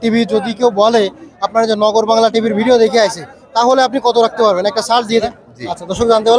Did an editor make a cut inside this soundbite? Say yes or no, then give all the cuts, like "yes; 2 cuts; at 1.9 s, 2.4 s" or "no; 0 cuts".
yes; 1 cut; at 5.2 s